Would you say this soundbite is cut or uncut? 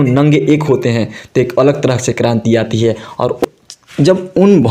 cut